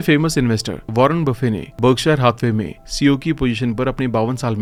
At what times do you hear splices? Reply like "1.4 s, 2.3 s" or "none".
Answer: none